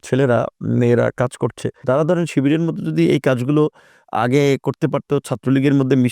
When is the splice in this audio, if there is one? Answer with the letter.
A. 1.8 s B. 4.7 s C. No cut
A